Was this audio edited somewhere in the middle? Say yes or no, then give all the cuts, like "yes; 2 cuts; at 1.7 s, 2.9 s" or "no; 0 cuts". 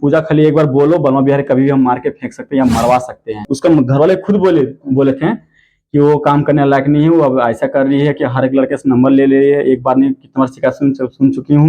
yes; 1 cut; at 3.5 s